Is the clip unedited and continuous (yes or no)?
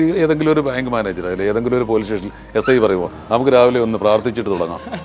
yes